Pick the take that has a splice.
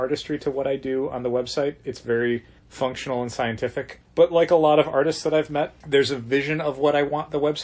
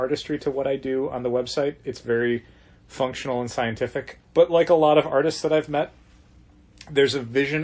first; 2 cuts; at 2.6 s, 5.8 s

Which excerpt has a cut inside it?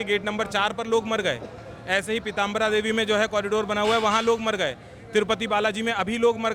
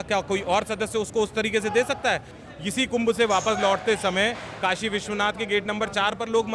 second; 1 cut; at 2.3 s

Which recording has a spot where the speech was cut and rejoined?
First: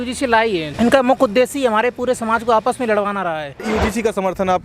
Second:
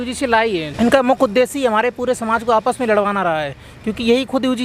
first; 1 cut; at 3.7 s

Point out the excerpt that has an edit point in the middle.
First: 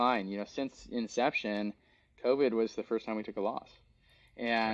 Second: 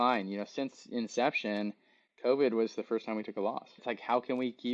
second; 1 cut; at 3.8 s

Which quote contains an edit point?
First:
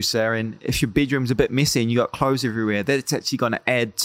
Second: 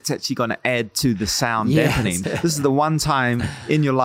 second; 1 cut; at 2.2 s

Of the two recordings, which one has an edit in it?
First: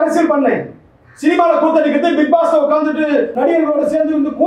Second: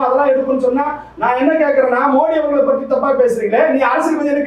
first; 1 cut; at 3.3 s

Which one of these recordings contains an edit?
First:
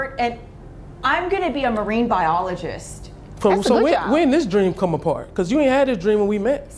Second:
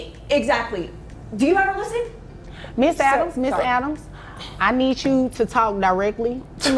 second; 1 cut; at 4.1 s

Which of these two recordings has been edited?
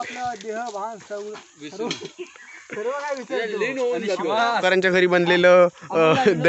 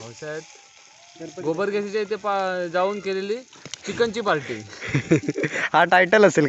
first; 1 cut; at 4.6 s

